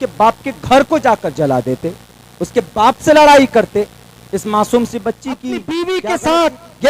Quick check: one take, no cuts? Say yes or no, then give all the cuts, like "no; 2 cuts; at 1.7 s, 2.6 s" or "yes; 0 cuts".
no; 1 cut; at 5.5 s